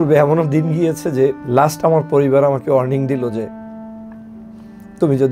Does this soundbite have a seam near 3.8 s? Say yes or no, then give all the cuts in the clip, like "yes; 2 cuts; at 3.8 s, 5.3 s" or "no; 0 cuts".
no; 1 cut; at 1.4 s